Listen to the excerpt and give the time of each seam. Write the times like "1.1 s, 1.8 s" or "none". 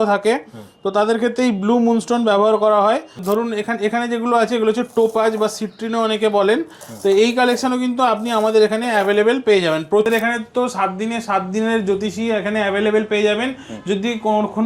3.2 s, 10.1 s